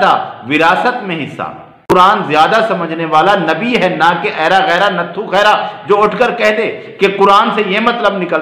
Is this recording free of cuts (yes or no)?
no